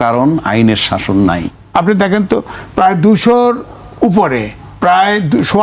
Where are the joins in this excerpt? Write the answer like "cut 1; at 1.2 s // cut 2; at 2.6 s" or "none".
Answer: cut 1; at 1.5 s